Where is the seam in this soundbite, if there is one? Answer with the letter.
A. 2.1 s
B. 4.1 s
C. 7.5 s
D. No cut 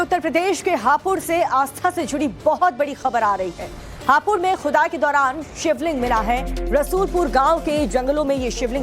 B